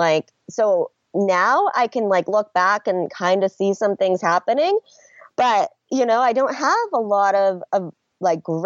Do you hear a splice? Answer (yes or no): no